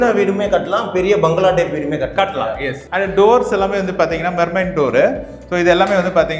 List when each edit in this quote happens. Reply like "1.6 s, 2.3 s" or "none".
2.8 s

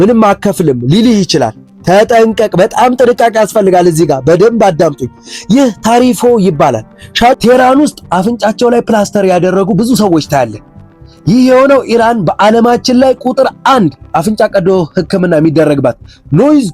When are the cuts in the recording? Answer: 7.4 s

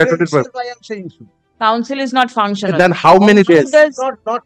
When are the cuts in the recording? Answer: none

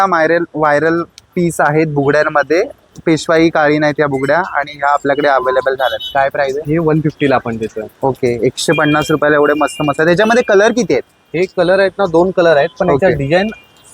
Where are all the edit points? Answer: none

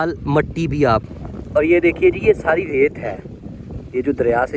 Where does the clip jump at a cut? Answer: 1.0 s

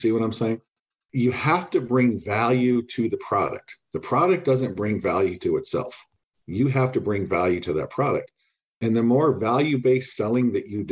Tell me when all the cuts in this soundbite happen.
0.9 s

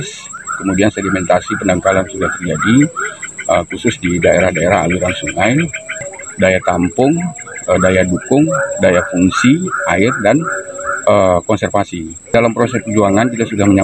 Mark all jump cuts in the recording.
6.2 s, 12.3 s

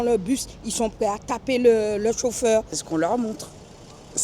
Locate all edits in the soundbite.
2.8 s

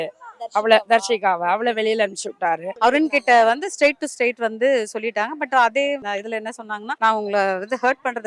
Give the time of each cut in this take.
2.7 s, 6.3 s

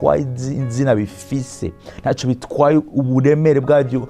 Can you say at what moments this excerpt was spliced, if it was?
none

